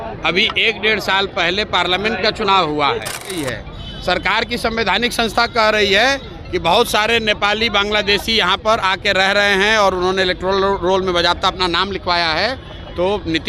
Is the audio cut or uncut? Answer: cut